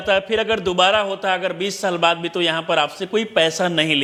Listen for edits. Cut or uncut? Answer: uncut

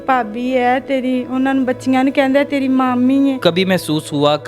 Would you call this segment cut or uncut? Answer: cut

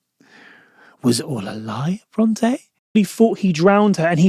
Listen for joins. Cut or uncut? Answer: cut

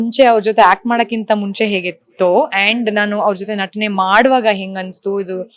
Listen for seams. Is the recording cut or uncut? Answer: uncut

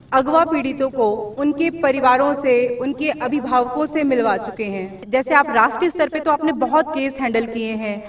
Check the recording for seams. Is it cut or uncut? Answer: cut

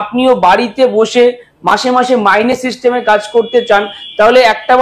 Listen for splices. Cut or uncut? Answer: uncut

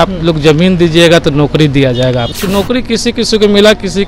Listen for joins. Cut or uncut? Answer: cut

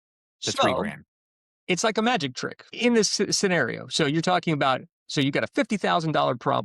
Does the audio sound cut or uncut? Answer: cut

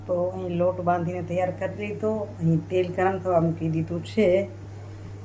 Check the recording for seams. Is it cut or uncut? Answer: uncut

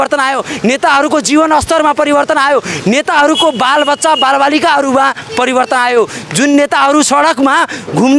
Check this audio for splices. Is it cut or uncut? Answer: uncut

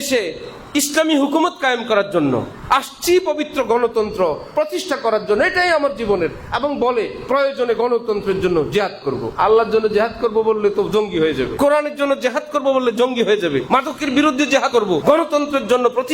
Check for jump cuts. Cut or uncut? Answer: cut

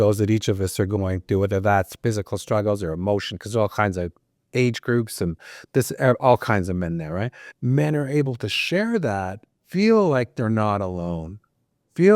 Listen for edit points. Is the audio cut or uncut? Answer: cut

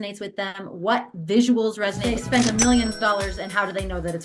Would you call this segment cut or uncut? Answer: cut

